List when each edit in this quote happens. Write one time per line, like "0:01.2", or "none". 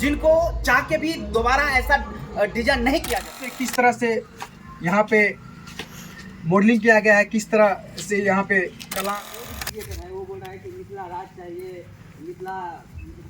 0:03.6
0:09.1